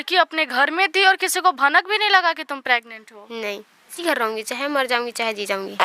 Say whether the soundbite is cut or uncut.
cut